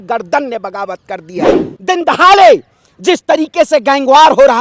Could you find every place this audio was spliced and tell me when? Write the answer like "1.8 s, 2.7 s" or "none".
1.6 s